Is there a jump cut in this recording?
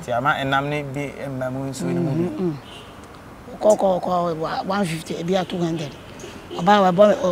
no; 0 cuts

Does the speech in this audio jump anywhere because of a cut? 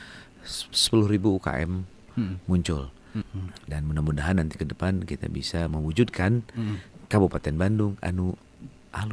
yes; 1 cut; at 3.4 s

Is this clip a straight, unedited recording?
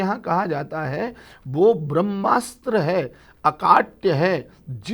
yes; 0 cuts

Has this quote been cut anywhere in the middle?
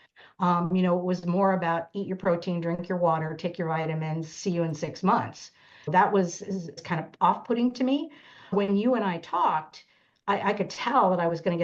yes; 3 cuts; at 5.9 s, 6.8 s, 8.5 s

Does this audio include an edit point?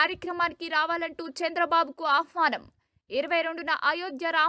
no; 0 cuts

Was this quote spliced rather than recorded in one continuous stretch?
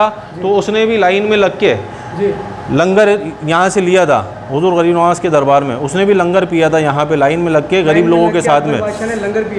no; 0 cuts

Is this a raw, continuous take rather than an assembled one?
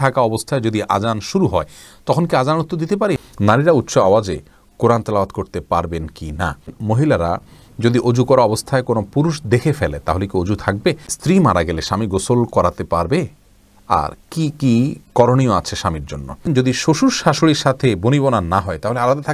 no; 4 cuts; at 3.2 s, 6.7 s, 11.1 s, 16.4 s

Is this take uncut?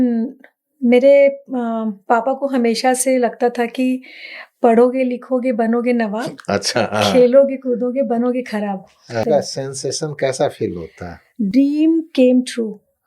no; 1 cut; at 9.2 s

